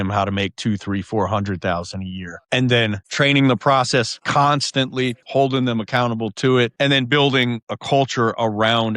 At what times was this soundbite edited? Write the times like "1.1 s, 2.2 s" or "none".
5.2 s, 6.7 s, 7.7 s